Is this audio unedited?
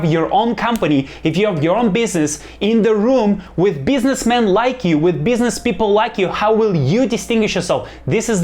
yes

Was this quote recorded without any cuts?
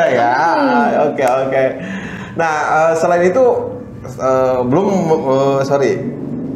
yes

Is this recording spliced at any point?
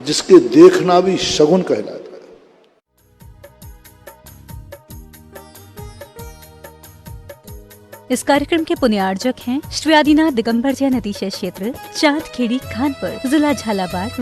yes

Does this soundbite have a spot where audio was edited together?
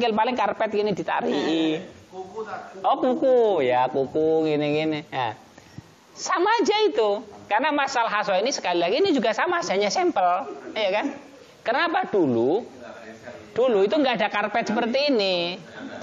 no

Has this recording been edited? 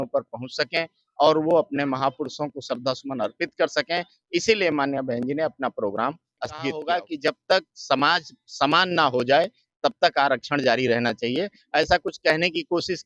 yes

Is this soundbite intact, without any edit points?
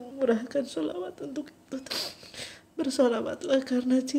no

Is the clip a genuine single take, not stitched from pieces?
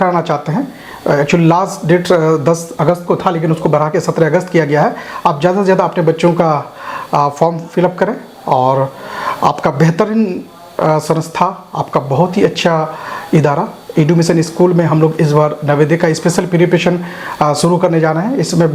yes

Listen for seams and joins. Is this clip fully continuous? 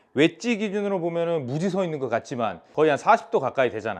no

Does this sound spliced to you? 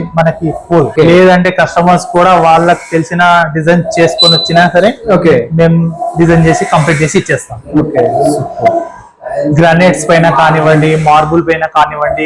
yes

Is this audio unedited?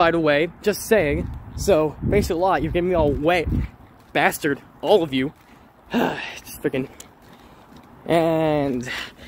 yes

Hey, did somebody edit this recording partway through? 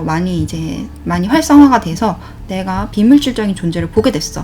yes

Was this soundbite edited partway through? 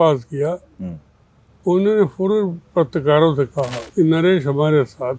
yes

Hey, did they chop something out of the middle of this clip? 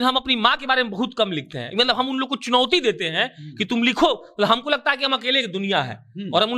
no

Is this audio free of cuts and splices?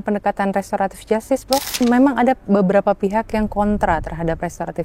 no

